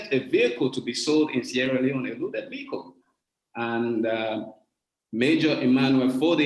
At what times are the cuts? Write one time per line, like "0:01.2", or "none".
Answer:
none